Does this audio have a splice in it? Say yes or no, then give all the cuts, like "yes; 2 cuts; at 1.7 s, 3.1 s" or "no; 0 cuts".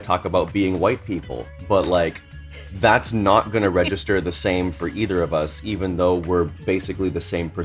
no; 0 cuts